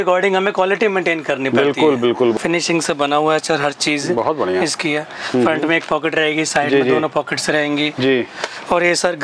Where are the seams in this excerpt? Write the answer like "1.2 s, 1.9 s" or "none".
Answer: 2.3 s